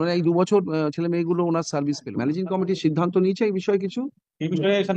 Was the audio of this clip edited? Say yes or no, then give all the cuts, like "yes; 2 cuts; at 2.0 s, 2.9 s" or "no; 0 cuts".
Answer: yes; 1 cut; at 2.1 s